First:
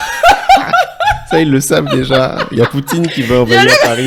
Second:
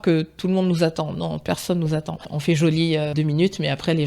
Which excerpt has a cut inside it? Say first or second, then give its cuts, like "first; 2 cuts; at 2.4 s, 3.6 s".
second; 2 cuts; at 2.3 s, 3.1 s